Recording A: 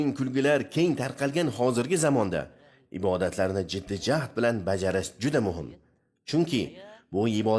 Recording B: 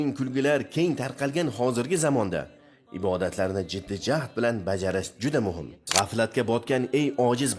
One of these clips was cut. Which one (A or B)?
B